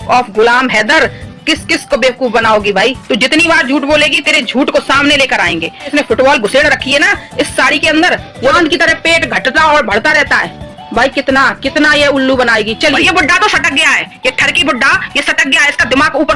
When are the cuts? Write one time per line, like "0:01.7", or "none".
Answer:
0:03.0
0:05.9
0:08.5
0:12.9